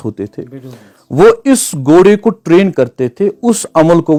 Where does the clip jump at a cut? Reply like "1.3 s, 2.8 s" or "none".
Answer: none